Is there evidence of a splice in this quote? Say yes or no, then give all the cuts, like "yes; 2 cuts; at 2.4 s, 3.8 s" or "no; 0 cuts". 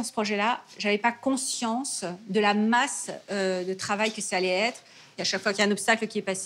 yes; 1 cut; at 5.2 s